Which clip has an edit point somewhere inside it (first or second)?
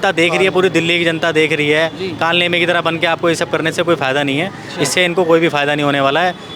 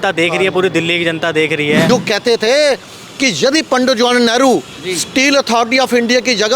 second